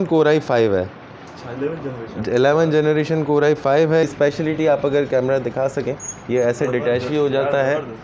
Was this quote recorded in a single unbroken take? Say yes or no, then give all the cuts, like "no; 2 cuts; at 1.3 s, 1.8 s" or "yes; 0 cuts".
no; 1 cut; at 4.0 s